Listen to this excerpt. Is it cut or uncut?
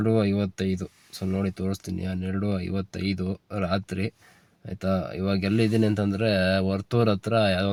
uncut